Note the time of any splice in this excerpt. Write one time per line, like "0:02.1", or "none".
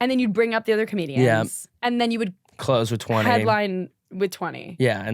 0:01.6